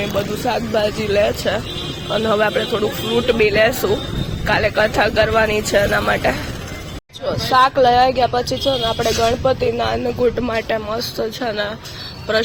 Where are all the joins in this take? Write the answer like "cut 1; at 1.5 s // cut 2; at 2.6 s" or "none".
none